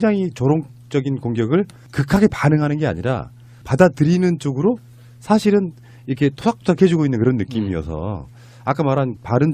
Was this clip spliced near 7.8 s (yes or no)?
no